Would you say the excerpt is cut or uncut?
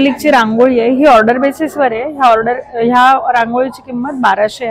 uncut